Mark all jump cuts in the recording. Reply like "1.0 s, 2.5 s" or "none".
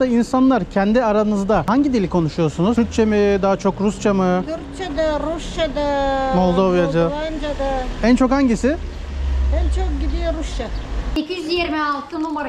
1.6 s, 2.7 s, 11.2 s